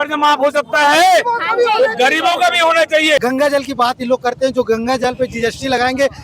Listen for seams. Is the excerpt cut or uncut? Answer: cut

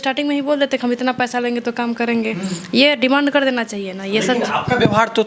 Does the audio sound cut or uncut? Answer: uncut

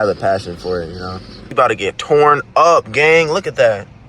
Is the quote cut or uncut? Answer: cut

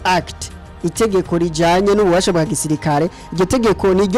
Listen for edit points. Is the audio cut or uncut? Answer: uncut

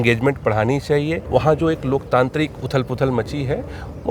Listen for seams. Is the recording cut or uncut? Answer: cut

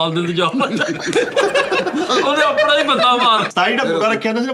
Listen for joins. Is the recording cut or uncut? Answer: cut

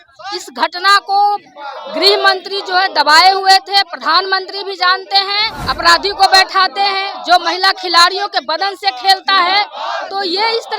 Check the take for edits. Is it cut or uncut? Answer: cut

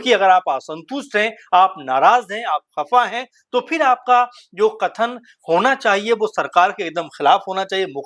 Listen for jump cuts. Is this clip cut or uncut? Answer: uncut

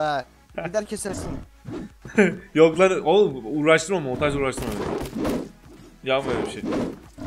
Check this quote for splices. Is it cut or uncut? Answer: uncut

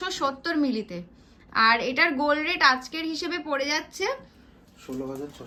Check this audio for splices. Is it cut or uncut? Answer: uncut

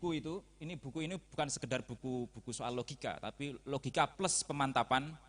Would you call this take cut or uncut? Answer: uncut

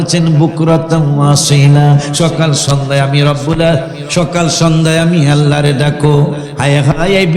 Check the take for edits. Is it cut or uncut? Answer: cut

